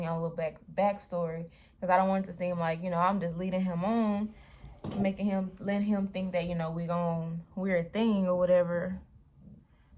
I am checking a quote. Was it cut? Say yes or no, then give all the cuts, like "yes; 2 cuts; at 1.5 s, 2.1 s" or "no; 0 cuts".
no; 0 cuts